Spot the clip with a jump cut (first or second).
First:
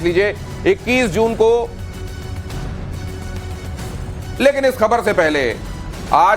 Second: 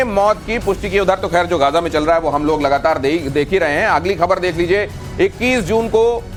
first